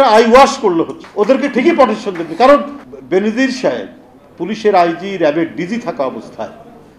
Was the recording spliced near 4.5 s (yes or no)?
no